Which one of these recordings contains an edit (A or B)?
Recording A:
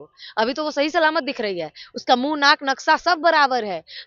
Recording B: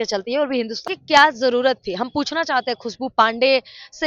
B